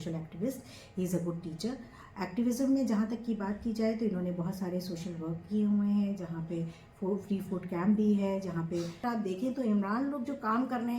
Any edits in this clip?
yes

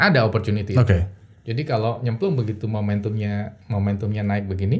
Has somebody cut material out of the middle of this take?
no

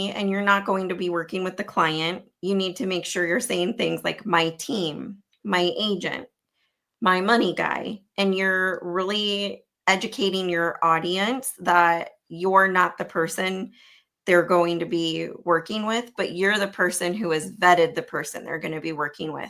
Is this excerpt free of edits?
yes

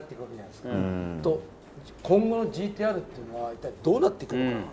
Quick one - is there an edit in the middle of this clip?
no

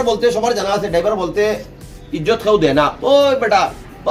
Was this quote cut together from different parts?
no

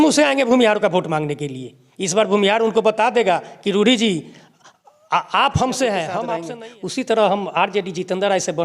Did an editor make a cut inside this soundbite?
yes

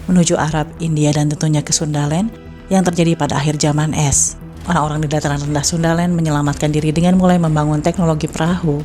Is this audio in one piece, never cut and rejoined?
no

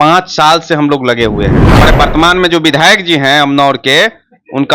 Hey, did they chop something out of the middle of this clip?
yes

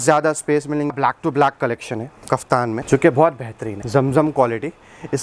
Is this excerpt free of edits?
no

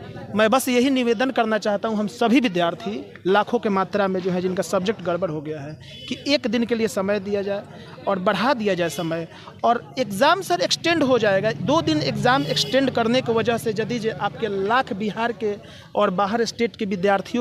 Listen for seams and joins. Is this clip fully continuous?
yes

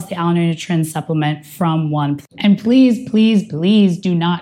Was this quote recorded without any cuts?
no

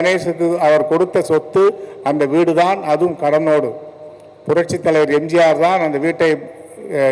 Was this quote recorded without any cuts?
yes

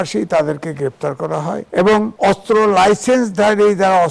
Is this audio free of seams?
no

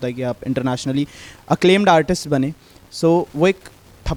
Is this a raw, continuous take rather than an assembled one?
yes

